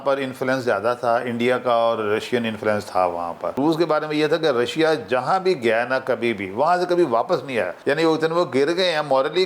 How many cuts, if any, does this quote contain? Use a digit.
2